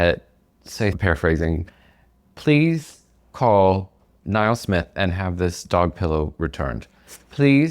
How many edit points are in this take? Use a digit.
1